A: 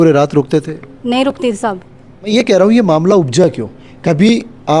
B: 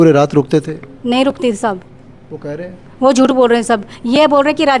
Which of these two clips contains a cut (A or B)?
A